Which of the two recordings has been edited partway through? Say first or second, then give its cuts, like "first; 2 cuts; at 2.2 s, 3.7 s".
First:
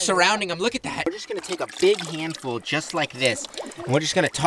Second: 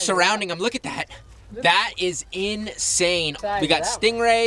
first; 1 cut; at 1.1 s